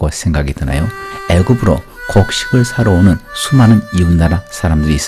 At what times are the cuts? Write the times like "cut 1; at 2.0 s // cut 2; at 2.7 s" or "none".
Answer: cut 1; at 1.1 s